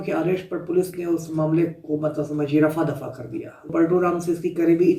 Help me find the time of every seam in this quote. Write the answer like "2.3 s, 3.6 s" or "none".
3.7 s